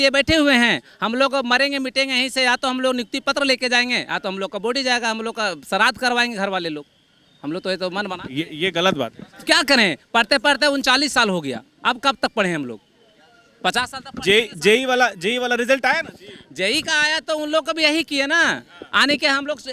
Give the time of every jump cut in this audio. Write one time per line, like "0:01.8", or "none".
none